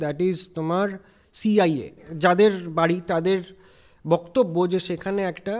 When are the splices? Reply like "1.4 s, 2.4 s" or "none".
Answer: 2.1 s